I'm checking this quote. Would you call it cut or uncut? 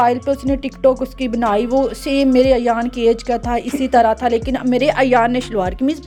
uncut